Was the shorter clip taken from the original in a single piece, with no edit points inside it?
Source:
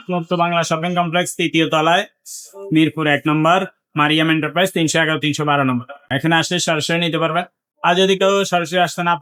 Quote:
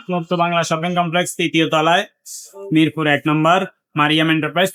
yes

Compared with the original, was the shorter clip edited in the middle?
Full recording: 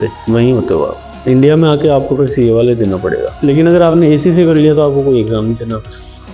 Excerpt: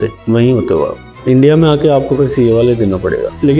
no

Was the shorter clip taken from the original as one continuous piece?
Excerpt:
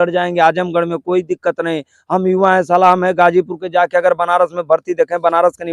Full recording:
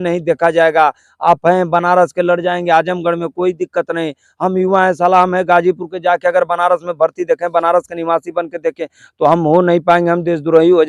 yes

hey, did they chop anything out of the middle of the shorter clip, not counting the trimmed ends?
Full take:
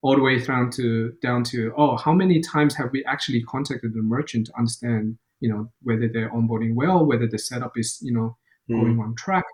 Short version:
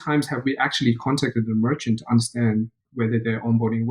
yes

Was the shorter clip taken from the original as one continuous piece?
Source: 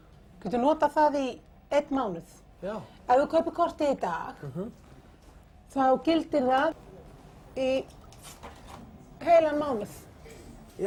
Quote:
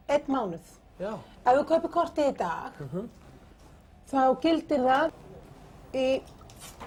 yes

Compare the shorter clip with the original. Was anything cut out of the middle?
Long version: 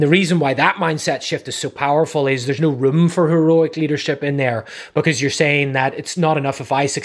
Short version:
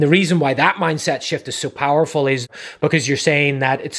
yes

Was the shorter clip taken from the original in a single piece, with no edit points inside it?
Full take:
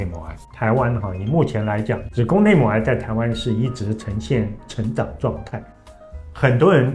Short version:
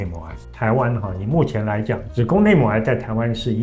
yes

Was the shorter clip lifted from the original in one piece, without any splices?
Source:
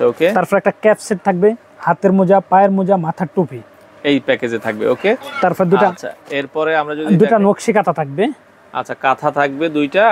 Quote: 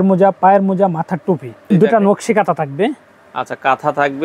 no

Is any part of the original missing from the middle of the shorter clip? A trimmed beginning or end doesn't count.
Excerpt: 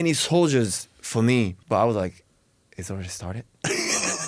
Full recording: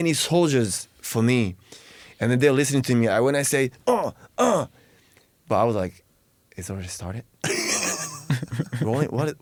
yes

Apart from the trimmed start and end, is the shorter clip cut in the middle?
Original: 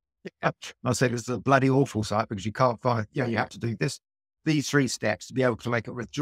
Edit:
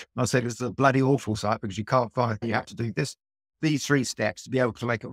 yes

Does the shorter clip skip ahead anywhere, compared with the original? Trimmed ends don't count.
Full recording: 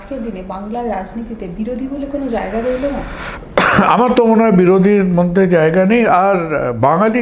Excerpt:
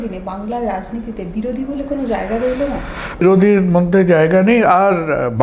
yes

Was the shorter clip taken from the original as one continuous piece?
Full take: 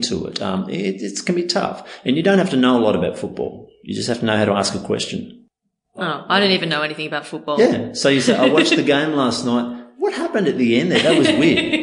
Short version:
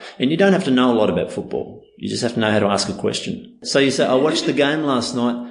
no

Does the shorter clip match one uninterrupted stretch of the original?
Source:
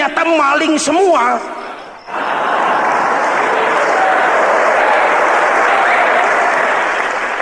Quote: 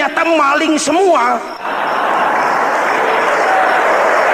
no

